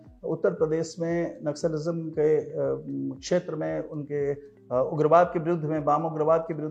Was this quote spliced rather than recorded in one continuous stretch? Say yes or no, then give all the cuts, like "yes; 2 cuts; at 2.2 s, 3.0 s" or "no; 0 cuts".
no; 0 cuts